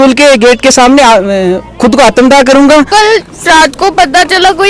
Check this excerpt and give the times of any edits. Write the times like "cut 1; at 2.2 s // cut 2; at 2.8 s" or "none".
cut 1; at 2.9 s